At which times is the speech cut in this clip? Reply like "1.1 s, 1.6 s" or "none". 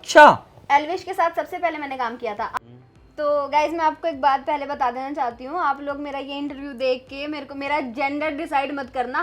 2.5 s